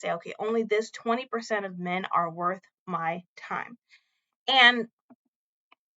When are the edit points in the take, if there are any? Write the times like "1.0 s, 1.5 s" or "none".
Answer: none